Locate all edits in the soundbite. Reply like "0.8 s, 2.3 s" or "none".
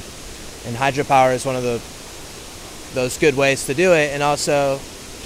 none